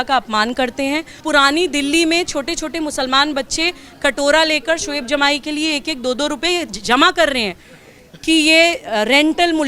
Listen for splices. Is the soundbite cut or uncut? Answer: cut